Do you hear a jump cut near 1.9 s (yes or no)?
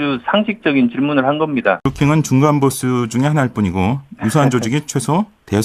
yes